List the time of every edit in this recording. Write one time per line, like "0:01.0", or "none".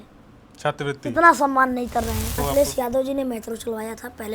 0:02.4